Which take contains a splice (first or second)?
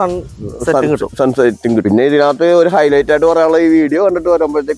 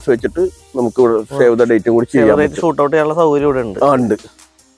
first